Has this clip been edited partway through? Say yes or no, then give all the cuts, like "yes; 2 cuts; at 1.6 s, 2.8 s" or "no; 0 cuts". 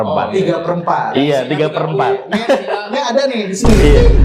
no; 0 cuts